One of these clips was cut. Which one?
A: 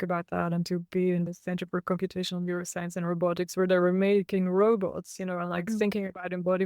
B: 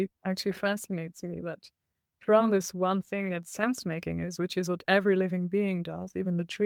A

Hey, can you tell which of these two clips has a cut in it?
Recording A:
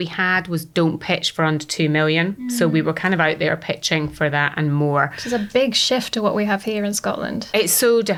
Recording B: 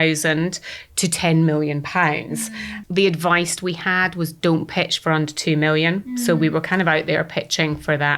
B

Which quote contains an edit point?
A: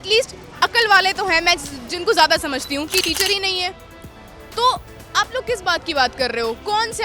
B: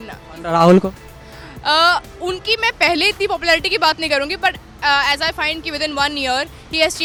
A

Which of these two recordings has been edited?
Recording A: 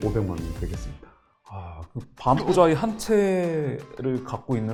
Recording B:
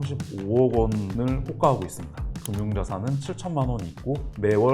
B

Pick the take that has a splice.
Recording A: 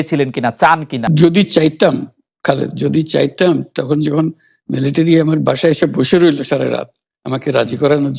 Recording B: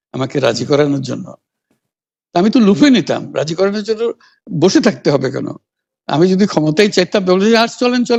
A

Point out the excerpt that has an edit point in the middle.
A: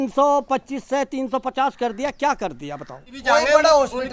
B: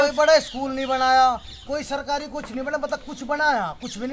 A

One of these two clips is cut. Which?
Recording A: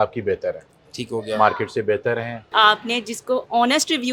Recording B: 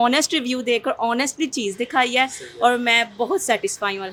A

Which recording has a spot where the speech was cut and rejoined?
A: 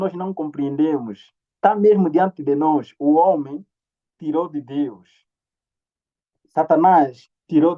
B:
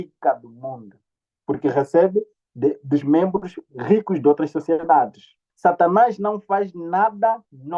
B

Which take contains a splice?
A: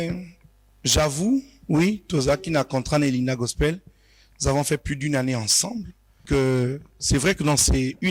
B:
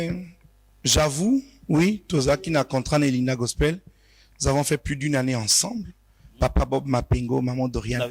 A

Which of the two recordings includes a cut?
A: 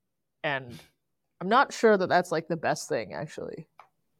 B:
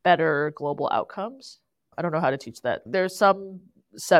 B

